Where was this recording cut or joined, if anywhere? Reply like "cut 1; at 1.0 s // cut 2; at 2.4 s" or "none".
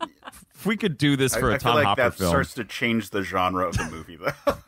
none